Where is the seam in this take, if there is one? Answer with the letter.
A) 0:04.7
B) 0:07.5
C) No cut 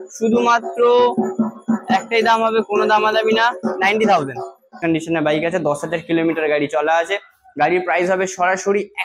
A